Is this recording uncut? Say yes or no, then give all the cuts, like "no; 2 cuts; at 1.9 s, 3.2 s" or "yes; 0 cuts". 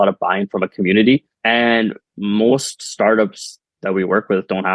no; 1 cut; at 1.3 s